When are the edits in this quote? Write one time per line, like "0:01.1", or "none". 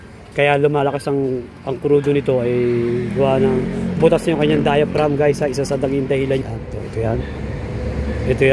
0:06.4